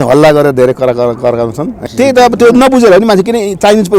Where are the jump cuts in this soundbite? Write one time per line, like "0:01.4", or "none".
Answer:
0:01.8